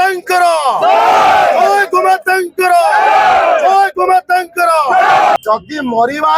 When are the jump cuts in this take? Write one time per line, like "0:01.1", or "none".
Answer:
0:05.4